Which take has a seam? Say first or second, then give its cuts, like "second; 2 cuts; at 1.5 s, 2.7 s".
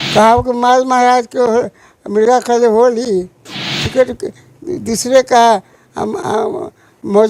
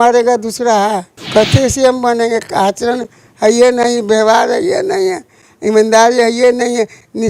second; 1 cut; at 1.1 s